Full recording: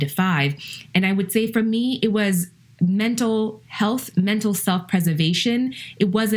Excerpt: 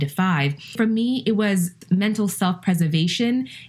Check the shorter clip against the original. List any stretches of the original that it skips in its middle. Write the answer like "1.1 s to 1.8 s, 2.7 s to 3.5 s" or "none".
0.7 s to 1.5 s, 2.6 s to 4.1 s